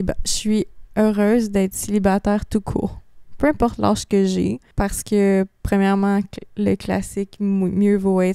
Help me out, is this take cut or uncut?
cut